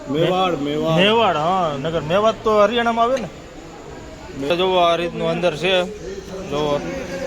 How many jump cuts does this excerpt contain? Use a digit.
1